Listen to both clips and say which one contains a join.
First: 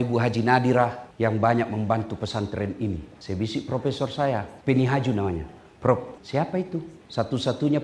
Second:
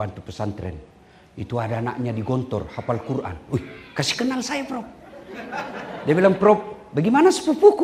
first; 4 cuts; at 1.0 s, 3.1 s, 4.5 s, 6.6 s

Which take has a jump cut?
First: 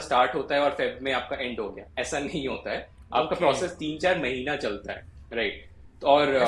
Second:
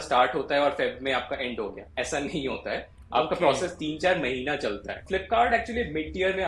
second; 1 cut; at 5.0 s

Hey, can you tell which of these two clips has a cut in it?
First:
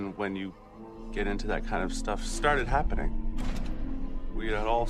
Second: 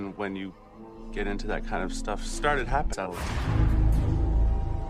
first; 1 cut; at 2.9 s

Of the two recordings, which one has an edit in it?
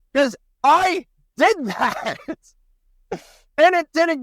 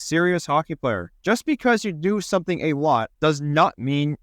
second; 2 cuts; at 1.1 s, 3.1 s

